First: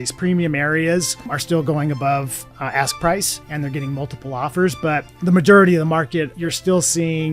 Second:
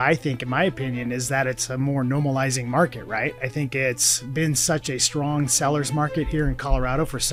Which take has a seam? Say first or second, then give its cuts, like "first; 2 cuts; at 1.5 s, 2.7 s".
first; 4 cuts; at 1.3 s, 3.4 s, 5.1 s, 6.4 s